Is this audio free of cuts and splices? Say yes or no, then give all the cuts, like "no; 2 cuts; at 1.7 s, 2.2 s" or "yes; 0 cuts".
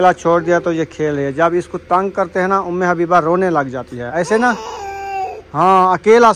no; 1 cut; at 4.0 s